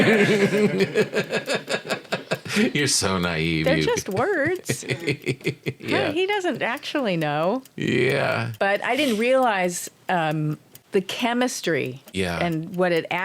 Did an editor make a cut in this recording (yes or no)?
yes